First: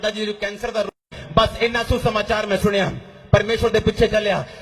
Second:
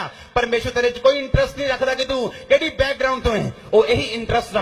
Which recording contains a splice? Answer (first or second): first